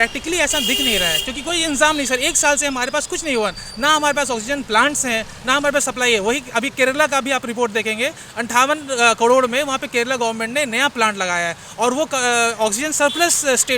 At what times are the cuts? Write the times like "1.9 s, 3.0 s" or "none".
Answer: none